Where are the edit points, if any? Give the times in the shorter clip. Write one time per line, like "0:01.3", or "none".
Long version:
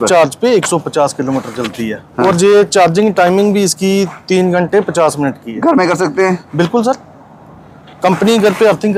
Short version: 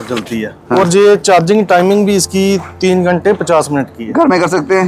none

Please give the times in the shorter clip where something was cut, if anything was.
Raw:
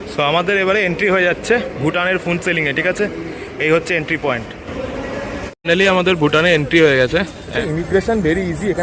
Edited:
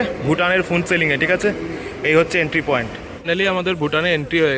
0:03.0

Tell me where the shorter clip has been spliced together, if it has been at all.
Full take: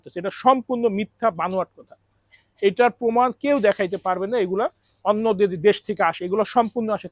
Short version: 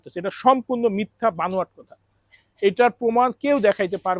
none

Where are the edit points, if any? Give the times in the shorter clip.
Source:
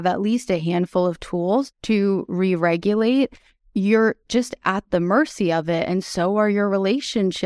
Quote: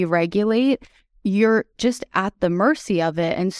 none

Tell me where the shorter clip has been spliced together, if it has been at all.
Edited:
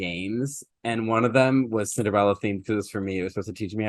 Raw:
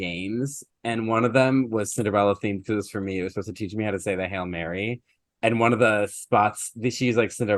none

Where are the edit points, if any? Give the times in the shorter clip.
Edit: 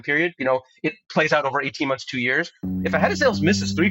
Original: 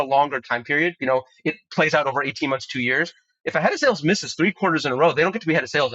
none

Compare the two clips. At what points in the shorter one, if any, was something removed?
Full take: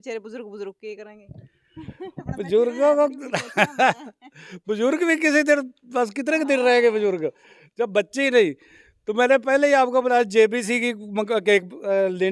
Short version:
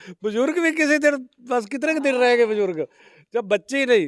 none

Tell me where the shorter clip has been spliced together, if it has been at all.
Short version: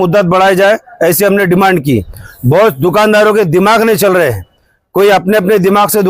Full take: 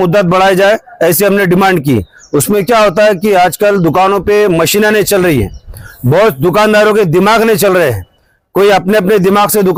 0:02.2

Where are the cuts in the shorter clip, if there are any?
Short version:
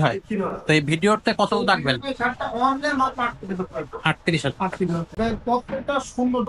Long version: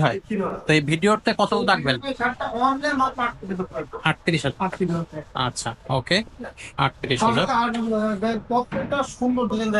0:05.1

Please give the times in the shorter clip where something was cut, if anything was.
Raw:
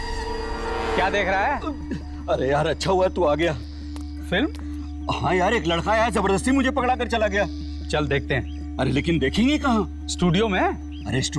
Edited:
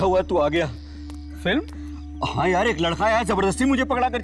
none

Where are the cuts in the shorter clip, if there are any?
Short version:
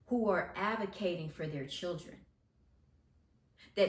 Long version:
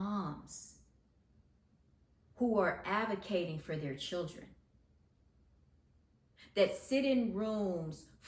0:02.4

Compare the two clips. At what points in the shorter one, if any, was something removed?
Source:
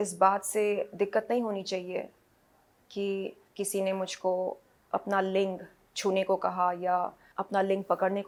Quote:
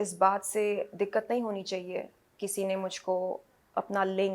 0:02.2

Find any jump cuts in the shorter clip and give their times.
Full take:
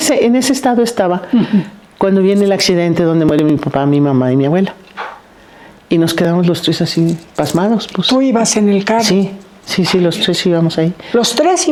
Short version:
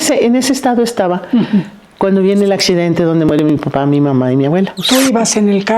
0:04.8

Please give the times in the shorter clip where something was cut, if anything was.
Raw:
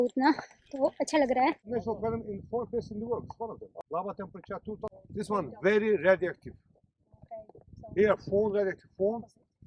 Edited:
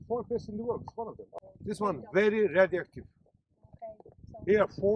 0:01.4

